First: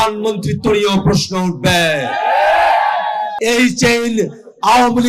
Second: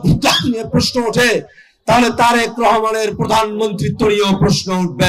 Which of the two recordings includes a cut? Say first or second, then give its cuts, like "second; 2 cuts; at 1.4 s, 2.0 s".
first; 1 cut; at 3.3 s